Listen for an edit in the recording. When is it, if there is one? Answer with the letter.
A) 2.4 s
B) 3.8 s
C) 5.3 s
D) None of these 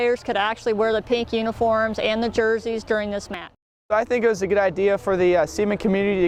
D